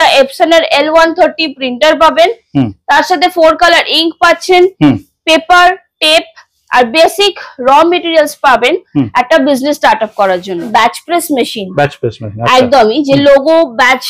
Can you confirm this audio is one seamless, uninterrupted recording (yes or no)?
no